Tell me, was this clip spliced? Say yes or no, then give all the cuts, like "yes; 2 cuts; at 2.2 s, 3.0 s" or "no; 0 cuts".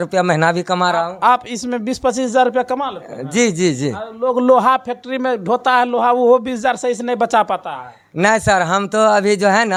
no; 0 cuts